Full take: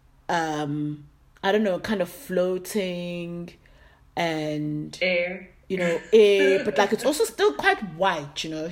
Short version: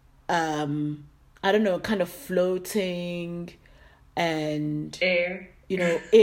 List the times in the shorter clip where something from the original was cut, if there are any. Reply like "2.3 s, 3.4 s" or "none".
none